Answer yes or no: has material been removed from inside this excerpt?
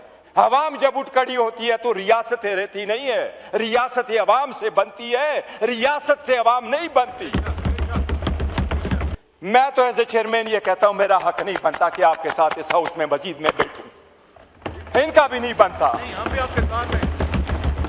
yes